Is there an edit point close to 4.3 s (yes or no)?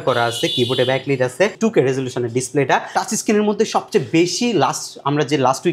no